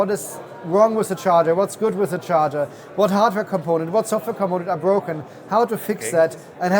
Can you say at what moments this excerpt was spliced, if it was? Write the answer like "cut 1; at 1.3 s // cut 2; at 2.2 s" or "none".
none